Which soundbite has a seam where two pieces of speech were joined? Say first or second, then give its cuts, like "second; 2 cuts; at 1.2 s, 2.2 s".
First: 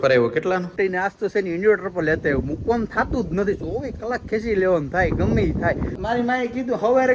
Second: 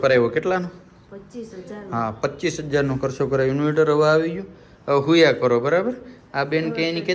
first; 2 cuts; at 0.7 s, 5.9 s